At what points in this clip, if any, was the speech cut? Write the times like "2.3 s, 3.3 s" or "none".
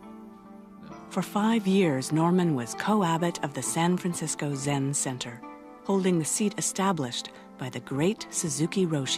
2.7 s